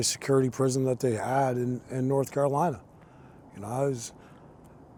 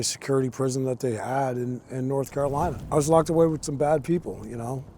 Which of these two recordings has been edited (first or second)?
second